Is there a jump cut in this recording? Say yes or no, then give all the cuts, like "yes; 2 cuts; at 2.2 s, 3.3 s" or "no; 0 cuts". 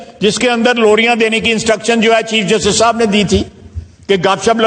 no; 0 cuts